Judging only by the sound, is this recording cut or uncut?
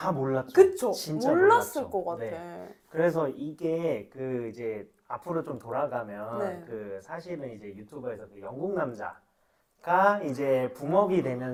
uncut